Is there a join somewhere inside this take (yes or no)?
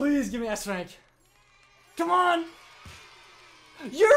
no